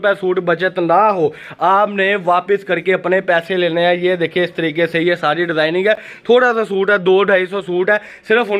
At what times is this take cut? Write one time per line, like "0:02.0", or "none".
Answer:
none